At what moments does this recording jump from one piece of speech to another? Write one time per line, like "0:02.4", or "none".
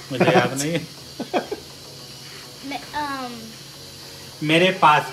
none